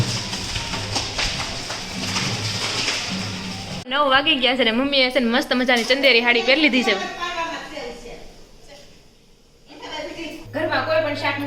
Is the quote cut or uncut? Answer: cut